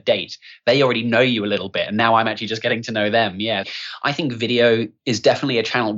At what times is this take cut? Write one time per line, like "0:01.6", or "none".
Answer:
0:03.6
0:04.9

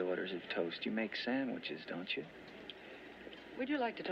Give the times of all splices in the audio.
0:02.5

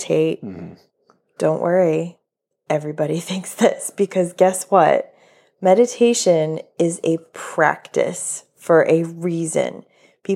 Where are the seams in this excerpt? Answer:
none

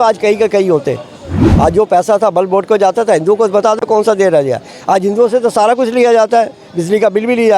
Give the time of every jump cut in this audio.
0:01.4

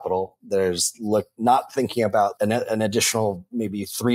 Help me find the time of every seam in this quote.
0:02.3

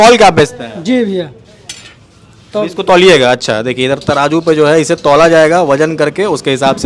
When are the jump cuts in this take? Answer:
none

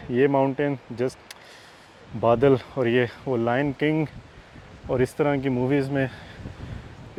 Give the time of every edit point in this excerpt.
none

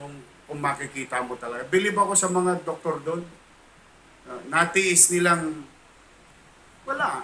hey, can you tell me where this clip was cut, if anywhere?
none

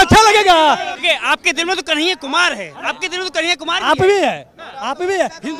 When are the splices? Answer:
0:00.9

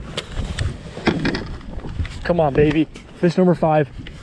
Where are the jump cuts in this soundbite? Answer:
none

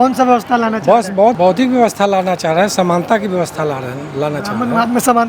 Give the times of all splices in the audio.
0:01.4

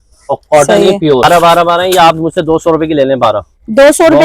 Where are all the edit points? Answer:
0:01.2

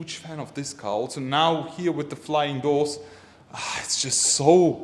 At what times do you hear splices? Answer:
none

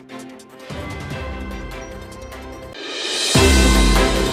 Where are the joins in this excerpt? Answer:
none

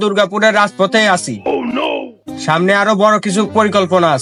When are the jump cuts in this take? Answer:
none

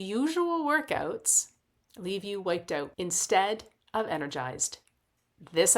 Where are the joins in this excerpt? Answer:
0:02.9

